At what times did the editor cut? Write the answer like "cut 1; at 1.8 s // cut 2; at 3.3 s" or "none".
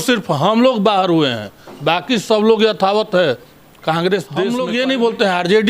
cut 1; at 4.6 s